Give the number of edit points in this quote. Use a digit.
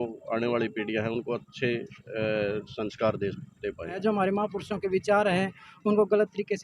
1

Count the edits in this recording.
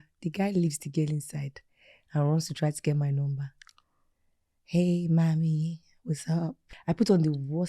1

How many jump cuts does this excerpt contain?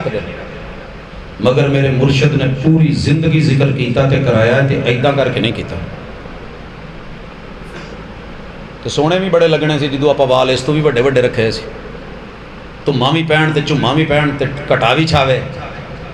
0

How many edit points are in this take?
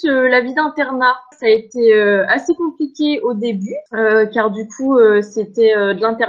2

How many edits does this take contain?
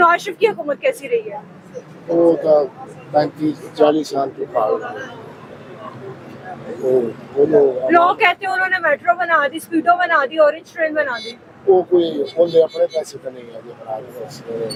0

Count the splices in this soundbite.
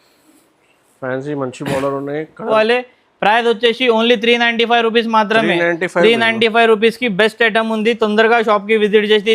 1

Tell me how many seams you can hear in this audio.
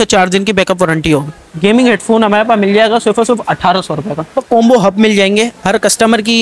2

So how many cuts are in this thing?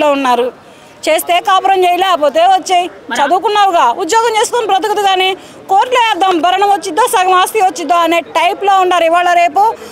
0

